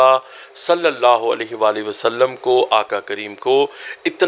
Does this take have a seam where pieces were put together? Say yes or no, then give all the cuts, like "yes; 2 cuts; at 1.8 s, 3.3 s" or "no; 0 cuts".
no; 0 cuts